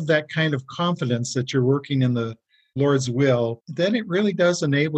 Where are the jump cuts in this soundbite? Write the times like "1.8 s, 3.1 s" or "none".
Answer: none